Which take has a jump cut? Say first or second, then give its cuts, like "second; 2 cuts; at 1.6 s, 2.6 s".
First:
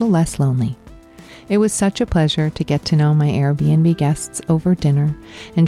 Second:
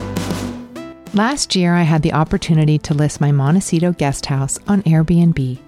second; 1 cut; at 1.0 s